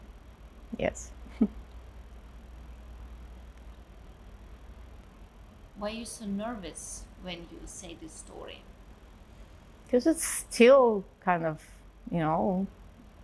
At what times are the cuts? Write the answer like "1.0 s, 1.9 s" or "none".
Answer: 5.0 s

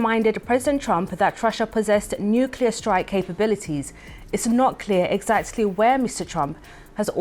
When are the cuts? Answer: none

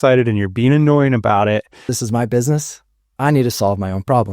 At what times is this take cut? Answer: 1.8 s

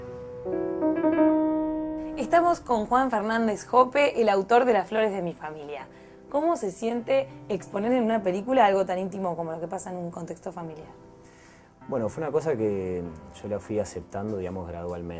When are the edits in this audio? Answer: 1.1 s

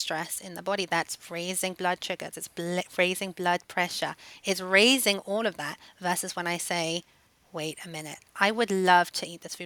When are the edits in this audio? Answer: none

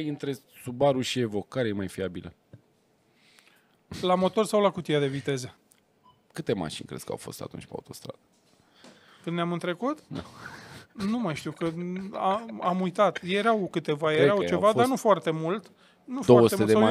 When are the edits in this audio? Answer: 5.6 s

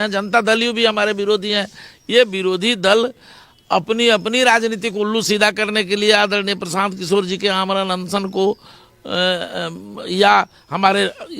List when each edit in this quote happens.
none

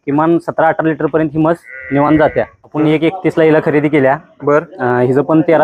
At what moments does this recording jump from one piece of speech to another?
2.6 s

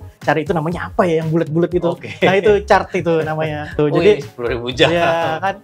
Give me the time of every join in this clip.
3.7 s

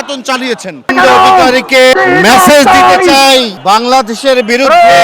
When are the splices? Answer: 0.9 s, 1.9 s, 3.5 s

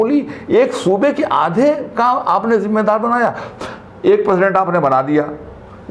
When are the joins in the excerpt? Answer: 3.5 s

